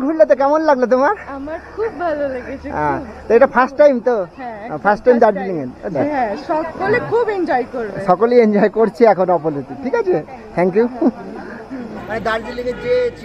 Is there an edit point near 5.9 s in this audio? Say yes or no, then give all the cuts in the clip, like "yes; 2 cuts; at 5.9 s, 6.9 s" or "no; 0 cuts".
yes; 2 cuts; at 5.9 s, 12.0 s